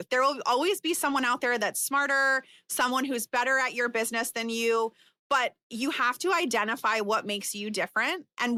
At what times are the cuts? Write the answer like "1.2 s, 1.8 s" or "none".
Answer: none